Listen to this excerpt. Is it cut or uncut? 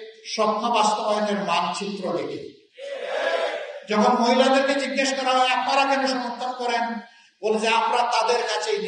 uncut